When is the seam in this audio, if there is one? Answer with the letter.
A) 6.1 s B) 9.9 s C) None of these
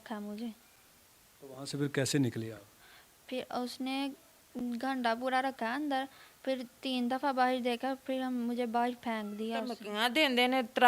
B